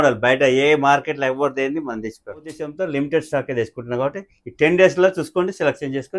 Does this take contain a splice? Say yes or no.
yes